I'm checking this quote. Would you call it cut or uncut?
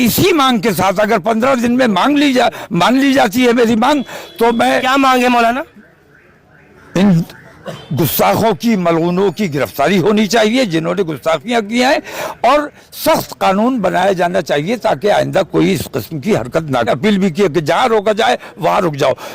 cut